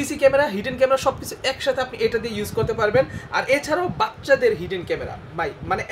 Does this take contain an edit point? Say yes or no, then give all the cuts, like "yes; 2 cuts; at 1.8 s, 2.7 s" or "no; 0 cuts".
no; 0 cuts